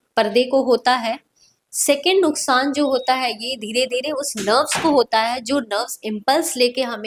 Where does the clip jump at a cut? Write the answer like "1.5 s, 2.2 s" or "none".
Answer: none